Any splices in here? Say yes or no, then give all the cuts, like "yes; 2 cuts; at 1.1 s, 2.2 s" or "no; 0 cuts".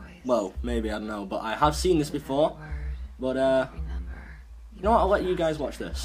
yes; 1 cut; at 1.9 s